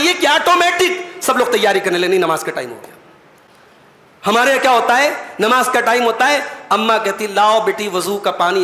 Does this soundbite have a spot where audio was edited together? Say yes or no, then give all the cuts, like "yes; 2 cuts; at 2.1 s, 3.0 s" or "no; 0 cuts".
no; 0 cuts